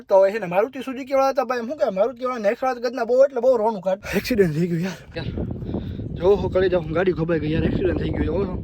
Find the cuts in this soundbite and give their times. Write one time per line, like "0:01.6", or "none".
0:04.0
0:05.2